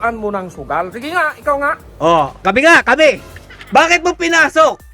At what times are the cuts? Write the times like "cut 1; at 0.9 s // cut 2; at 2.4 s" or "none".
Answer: none